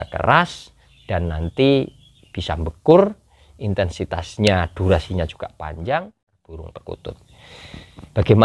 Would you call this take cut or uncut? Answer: cut